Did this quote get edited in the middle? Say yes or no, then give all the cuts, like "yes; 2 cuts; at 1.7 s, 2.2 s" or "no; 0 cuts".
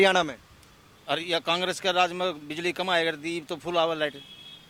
no; 0 cuts